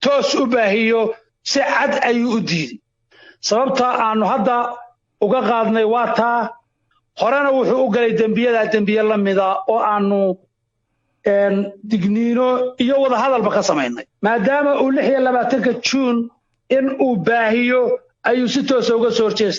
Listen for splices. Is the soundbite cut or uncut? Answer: uncut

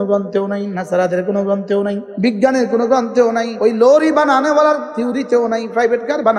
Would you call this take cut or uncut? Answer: cut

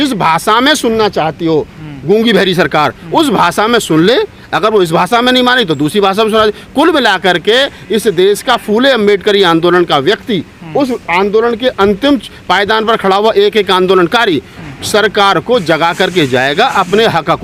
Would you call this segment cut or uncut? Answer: uncut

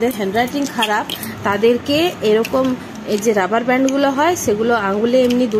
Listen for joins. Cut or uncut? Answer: uncut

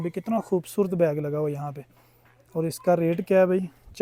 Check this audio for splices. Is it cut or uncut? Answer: uncut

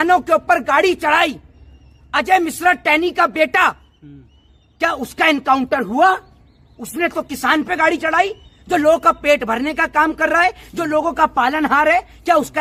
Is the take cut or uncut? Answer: uncut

